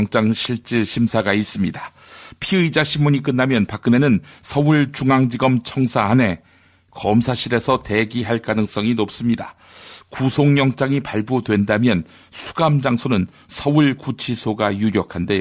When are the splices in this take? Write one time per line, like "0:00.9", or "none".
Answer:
none